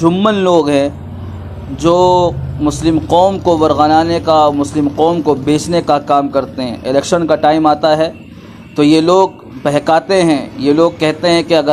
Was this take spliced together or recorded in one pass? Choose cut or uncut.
uncut